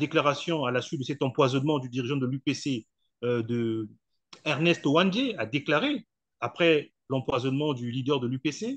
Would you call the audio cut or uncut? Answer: uncut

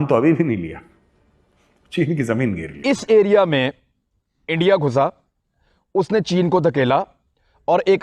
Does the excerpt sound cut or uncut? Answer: cut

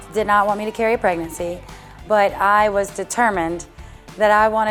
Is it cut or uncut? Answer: uncut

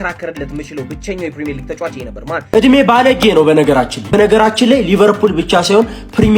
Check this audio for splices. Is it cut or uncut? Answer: cut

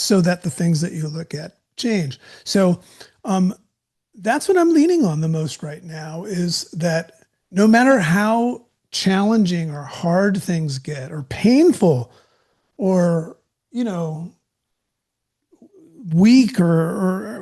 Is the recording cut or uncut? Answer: cut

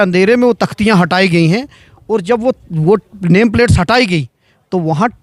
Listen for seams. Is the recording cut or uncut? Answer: uncut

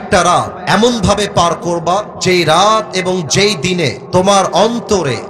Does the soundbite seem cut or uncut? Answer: uncut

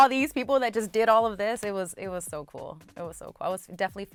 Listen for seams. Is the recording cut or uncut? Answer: uncut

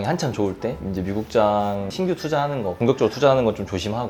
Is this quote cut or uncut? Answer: uncut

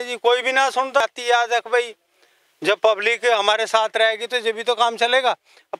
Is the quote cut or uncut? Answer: cut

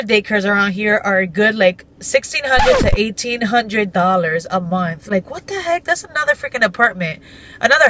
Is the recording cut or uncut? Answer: uncut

